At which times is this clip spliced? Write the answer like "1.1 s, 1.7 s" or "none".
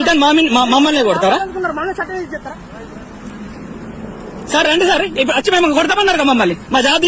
none